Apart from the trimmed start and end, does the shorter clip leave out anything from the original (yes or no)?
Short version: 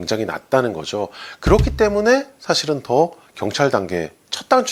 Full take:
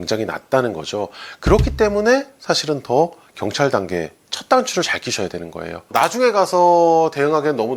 no